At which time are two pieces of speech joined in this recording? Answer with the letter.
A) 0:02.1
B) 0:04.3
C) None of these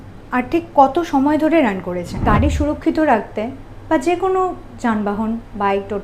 A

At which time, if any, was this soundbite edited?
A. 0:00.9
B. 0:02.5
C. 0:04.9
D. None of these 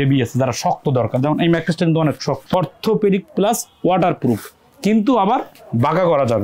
B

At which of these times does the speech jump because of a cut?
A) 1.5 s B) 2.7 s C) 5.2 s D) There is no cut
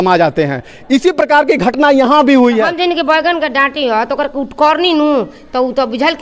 B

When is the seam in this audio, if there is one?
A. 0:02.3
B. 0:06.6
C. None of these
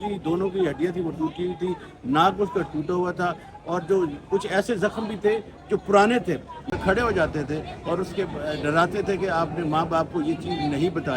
B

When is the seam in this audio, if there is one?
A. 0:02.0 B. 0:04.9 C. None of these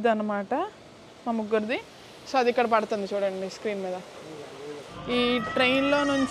B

